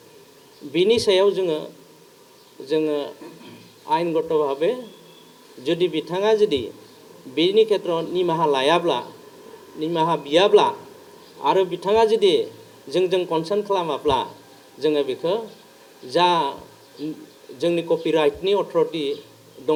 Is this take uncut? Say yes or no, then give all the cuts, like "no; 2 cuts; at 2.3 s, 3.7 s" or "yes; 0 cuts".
yes; 0 cuts